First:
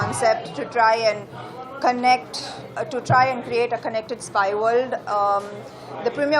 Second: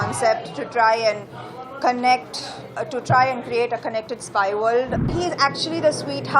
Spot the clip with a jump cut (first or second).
second